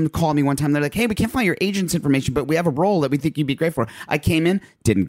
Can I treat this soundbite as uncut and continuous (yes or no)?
yes